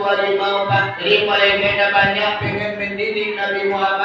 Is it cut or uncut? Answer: cut